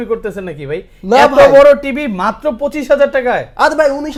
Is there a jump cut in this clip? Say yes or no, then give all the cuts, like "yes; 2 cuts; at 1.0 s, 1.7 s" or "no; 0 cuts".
no; 0 cuts